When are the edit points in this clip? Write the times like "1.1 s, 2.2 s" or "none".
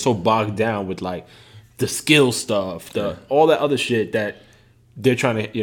none